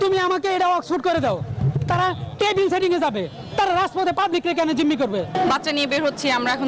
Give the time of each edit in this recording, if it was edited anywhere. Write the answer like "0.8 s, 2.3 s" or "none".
5.4 s